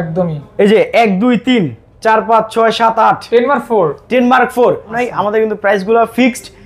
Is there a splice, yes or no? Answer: yes